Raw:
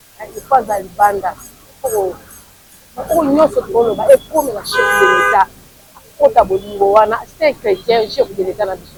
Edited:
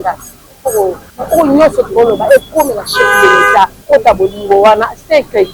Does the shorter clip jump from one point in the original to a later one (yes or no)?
yes